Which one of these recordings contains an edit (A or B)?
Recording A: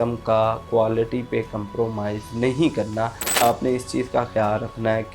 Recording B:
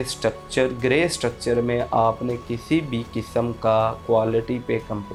A